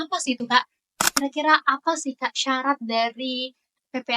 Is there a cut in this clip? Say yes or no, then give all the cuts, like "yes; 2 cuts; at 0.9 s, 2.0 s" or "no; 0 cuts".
yes; 1 cut; at 1.1 s